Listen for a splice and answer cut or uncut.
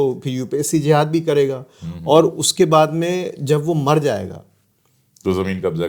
uncut